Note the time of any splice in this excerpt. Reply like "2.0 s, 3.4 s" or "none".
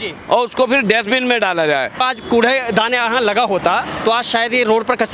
1.9 s